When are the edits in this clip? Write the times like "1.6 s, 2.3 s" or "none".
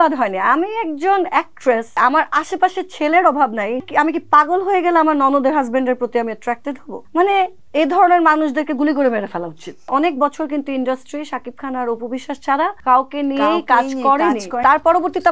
1.9 s, 3.9 s, 6.9 s, 7.6 s, 9.9 s, 12.8 s, 14.6 s